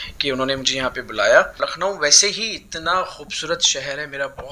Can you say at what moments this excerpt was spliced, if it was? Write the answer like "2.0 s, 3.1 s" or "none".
1.7 s